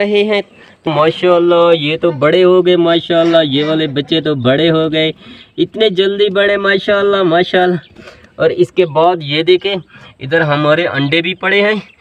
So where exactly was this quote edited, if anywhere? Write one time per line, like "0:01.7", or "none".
0:00.9